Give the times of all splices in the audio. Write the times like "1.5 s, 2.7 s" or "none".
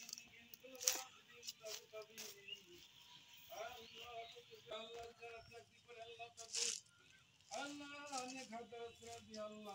4.7 s